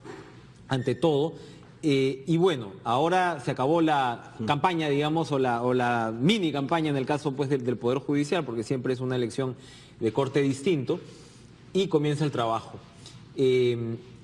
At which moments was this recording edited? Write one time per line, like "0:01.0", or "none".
0:05.0